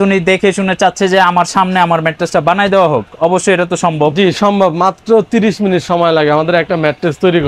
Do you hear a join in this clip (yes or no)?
no